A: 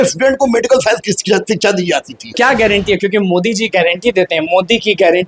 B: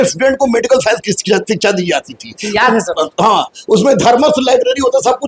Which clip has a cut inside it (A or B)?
A